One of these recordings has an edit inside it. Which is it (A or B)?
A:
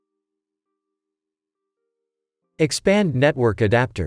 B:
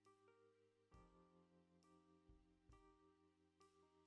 A